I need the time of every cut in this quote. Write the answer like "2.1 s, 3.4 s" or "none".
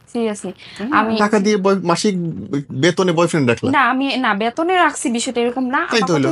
1.2 s